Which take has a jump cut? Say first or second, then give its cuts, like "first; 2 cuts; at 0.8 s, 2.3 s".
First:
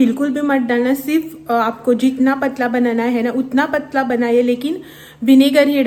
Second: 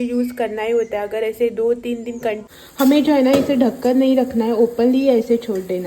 second; 1 cut; at 2.5 s